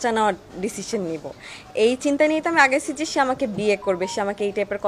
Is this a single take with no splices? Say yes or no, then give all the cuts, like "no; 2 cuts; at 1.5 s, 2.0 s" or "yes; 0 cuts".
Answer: yes; 0 cuts